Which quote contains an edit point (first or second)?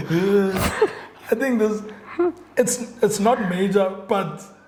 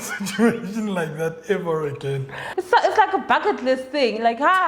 second